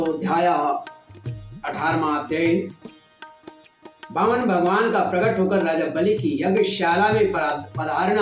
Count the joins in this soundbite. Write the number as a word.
zero